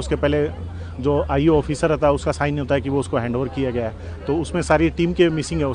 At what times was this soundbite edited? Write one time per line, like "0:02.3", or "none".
none

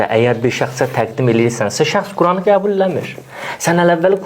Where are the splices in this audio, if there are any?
none

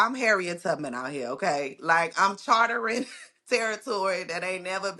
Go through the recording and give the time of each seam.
none

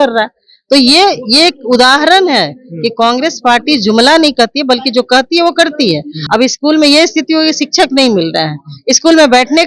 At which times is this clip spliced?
0:06.1

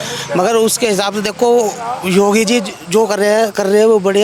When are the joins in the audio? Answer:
none

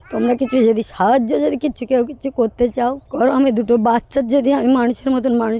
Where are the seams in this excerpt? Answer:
none

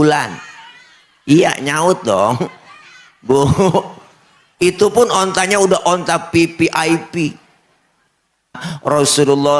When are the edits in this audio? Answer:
0:08.7

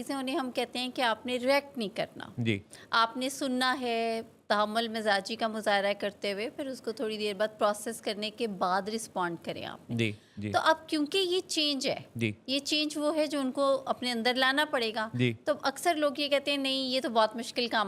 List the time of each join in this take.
none

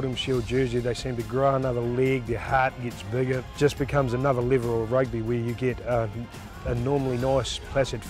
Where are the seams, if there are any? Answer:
0:03.4

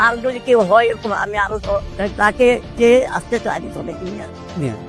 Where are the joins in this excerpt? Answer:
none

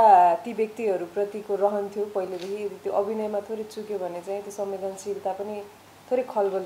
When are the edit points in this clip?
none

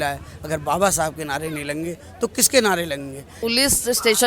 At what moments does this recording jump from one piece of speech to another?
0:03.3

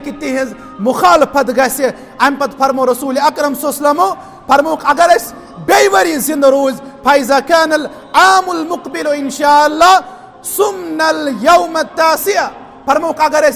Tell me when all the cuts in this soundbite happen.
none

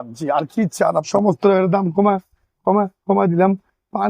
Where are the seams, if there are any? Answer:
0:01.1

